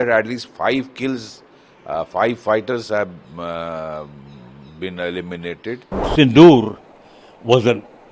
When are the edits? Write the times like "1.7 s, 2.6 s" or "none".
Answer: 6.1 s